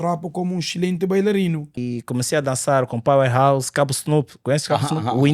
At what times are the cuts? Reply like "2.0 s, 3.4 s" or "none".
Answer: 1.8 s